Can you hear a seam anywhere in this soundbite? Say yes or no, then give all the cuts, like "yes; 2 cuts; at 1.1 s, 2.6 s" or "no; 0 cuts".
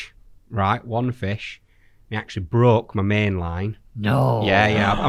no; 0 cuts